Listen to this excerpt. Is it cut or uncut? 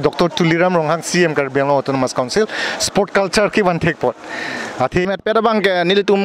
cut